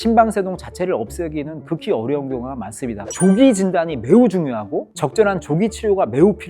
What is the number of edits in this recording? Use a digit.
1